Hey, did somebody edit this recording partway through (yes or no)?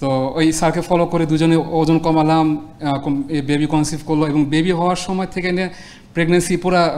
no